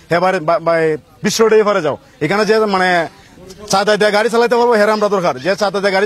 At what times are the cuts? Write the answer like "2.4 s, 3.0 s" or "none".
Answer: none